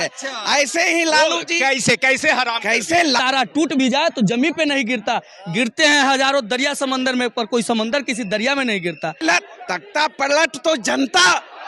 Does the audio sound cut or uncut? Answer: cut